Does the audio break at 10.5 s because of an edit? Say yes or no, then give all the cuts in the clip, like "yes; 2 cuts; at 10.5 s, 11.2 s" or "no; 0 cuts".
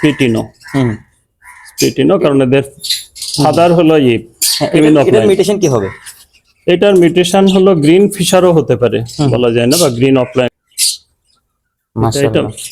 yes; 1 cut; at 10.5 s